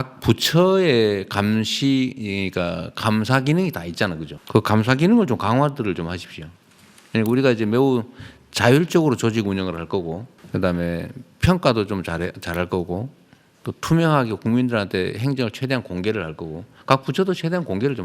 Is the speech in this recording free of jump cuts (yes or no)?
no